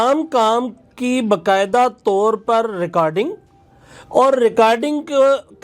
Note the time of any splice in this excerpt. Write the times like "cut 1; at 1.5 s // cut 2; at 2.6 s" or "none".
none